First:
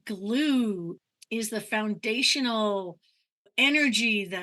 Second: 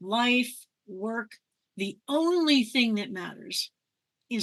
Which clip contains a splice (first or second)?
first